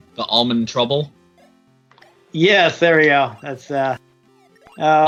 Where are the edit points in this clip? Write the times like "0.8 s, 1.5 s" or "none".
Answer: none

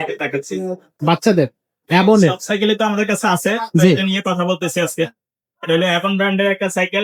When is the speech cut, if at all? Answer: none

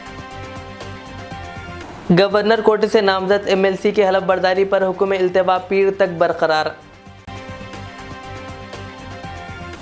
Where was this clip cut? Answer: none

